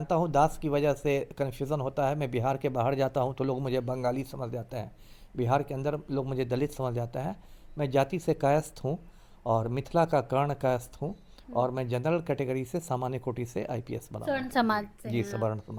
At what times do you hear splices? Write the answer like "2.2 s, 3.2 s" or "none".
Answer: none